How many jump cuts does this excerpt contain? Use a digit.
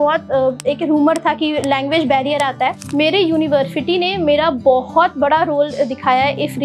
1